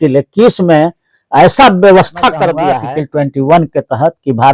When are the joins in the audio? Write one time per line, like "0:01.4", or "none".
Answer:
0:02.8